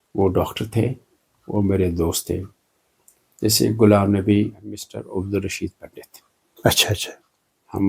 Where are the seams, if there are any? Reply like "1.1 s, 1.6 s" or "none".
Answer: 5.0 s